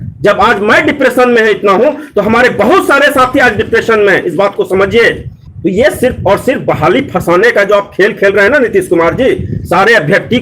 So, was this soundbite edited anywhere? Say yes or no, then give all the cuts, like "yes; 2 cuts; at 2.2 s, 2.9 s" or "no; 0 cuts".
yes; 1 cut; at 5.3 s